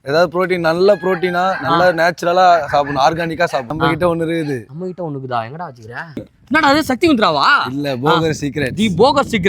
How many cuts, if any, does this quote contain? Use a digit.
2